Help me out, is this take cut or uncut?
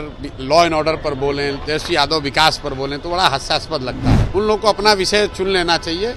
cut